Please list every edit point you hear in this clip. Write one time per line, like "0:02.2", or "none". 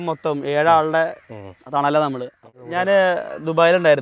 0:02.4